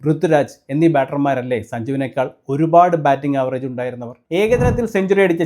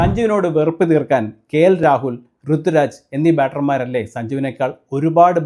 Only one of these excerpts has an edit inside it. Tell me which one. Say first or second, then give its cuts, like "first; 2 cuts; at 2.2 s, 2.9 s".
first; 1 cut; at 4.2 s